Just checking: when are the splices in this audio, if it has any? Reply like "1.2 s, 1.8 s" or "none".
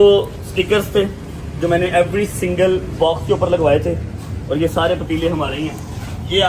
none

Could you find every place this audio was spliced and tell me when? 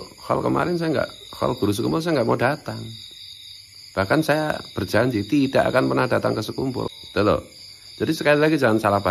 6.9 s

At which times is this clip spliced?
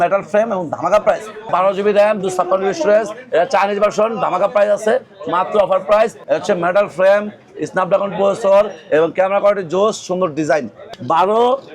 1.5 s, 6.2 s, 10.8 s

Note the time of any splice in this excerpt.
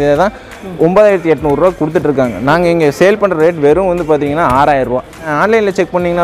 5.3 s

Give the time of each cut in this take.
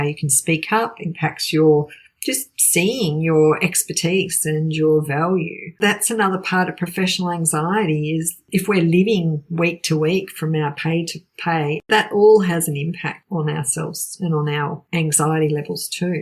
5.8 s, 8.4 s, 11.9 s, 13.2 s, 14.8 s

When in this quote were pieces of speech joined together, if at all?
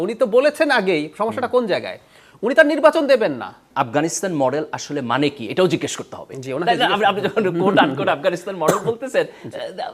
3.6 s

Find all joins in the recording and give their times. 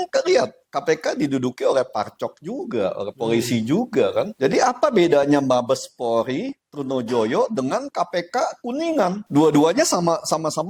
none

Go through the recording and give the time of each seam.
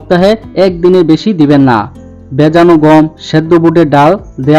none

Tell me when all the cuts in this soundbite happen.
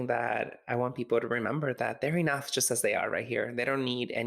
none

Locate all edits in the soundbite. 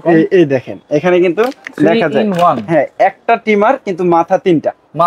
none

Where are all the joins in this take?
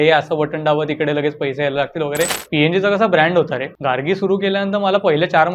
2.4 s, 3.7 s

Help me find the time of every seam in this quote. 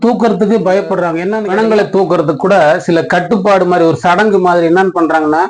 1.4 s

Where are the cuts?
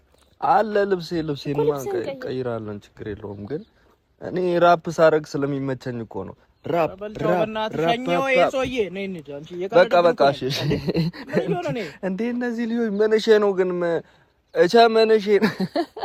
none

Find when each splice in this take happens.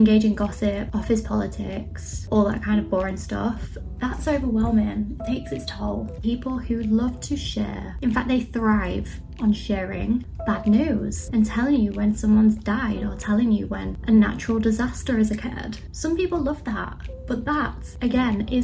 6.2 s, 7.8 s, 10.3 s, 11.2 s

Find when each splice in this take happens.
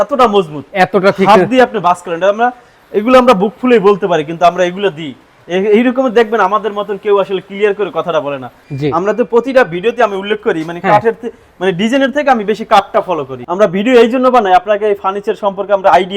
8.6 s, 13.3 s

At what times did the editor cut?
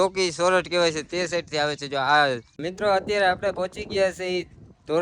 2.7 s

